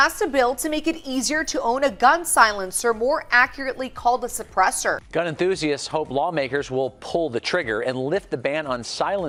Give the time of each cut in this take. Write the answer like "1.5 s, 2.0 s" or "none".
none